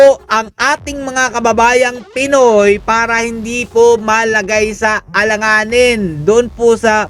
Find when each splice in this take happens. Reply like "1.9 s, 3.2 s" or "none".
none